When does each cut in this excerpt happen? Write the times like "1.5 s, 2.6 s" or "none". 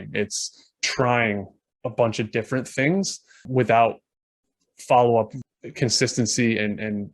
3.5 s, 5.4 s